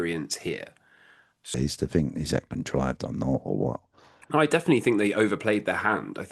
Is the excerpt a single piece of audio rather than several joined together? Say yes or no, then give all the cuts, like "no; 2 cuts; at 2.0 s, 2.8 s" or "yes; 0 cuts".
no; 1 cut; at 1.6 s